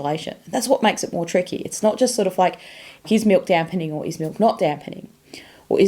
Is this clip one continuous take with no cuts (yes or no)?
no